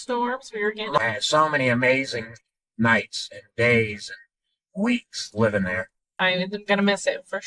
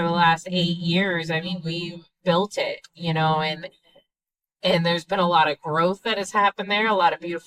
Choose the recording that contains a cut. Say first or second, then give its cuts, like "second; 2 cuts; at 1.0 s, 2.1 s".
first; 2 cuts; at 1.0 s, 6.1 s